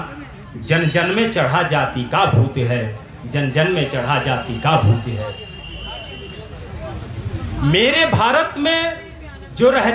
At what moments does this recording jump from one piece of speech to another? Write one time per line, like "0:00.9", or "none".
none